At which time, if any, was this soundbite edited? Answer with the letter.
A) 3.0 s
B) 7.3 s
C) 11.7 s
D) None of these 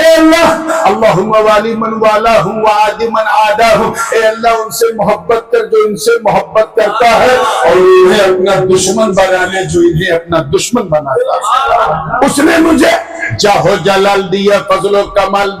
C